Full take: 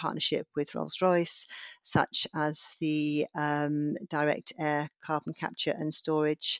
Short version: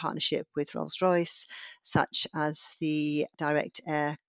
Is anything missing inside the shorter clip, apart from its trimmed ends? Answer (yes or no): yes